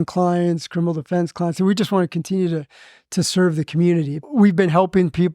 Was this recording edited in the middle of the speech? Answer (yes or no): yes